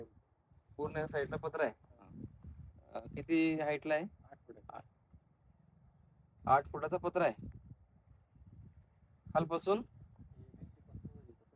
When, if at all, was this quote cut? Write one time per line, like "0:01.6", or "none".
none